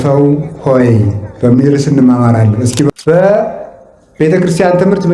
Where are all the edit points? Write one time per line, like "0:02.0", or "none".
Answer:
0:02.9

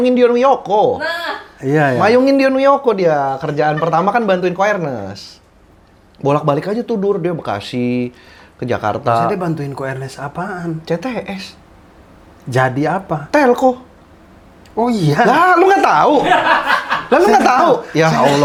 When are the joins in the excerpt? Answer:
none

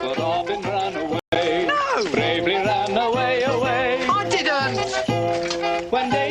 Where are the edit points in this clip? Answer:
none

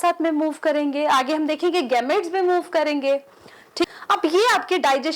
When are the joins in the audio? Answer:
0:03.9

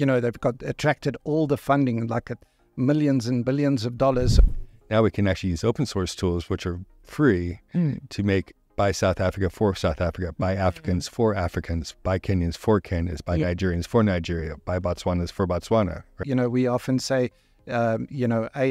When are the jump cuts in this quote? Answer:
0:04.5
0:16.2

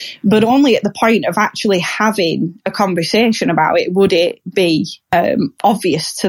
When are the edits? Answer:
0:05.0

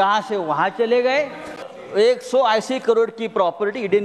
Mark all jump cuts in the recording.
0:01.7

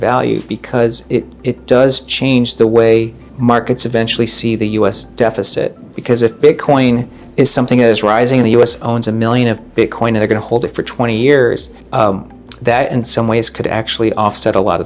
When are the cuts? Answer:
0:01.3
0:03.2
0:07.2
0:12.2

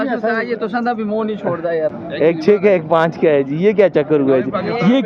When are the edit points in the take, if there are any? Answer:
0:01.9

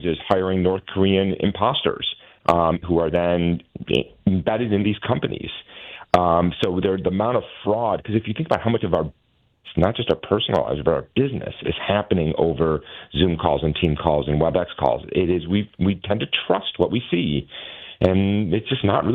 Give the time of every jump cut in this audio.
none

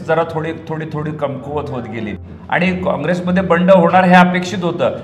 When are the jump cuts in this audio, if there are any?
0:02.2

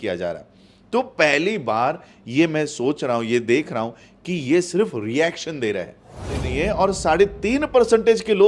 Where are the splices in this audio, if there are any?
0:06.5

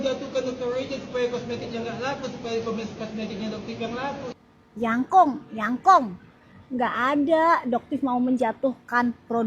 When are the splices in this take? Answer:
none

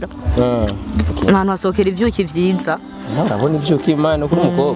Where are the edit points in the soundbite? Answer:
0:01.1

